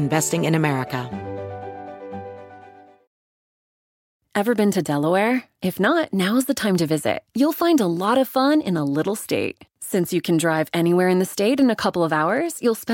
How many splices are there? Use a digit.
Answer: 1